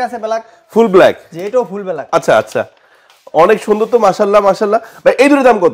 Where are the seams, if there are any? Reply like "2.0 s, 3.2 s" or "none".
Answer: none